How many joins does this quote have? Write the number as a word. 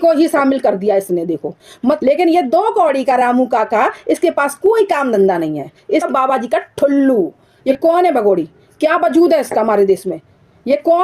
three